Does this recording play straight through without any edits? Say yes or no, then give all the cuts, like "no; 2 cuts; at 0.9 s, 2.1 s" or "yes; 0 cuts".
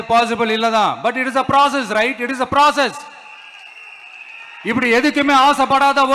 yes; 0 cuts